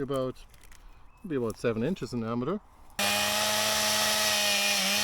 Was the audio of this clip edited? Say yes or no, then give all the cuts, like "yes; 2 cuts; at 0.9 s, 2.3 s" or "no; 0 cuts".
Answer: yes; 1 cut; at 3.0 s